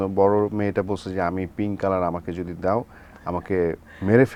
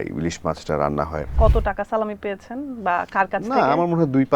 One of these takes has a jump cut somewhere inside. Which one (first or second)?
second